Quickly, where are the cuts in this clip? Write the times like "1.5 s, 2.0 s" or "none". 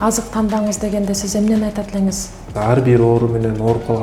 2.5 s